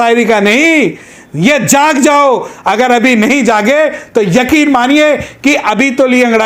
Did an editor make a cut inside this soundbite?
no; 0 cuts

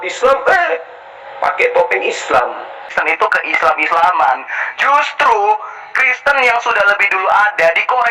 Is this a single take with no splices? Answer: no; 1 cut; at 2.9 s

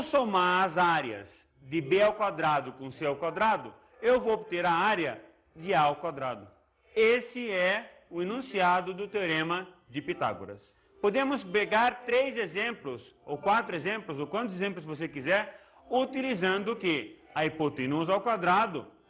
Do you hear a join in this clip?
no; 0 cuts

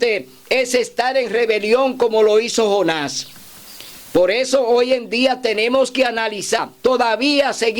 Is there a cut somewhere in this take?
yes; 1 cut; at 6.6 s

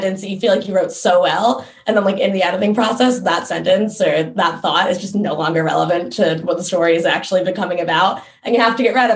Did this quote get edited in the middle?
no; 0 cuts

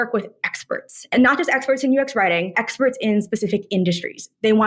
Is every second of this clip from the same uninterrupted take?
no; 1 cut; at 1.1 s

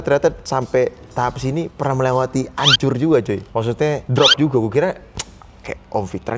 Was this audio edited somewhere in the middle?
no; 0 cuts

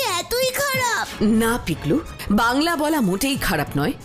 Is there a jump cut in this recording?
yes; 1 cut; at 1.1 s

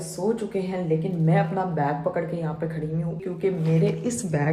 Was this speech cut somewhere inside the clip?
yes; 1 cut; at 3.2 s

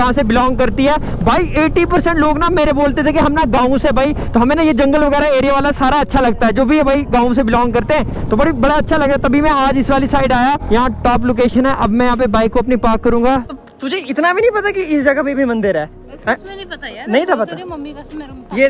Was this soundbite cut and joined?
no; 0 cuts

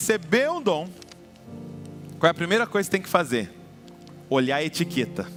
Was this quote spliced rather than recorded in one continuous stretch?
no; 0 cuts

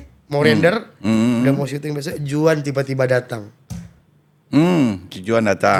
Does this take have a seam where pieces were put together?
no; 0 cuts

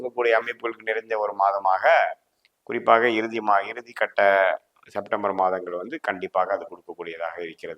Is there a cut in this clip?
no; 0 cuts

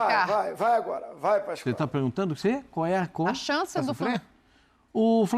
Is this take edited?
yes; 1 cut; at 4.0 s

